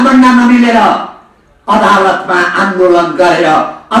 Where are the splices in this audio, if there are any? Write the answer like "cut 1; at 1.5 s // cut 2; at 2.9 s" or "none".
none